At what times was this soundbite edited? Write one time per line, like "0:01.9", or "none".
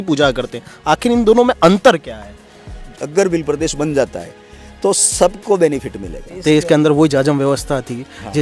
0:02.9
0:06.3